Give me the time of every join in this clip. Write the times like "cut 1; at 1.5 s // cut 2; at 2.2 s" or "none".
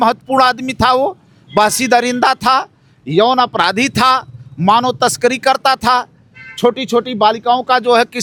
none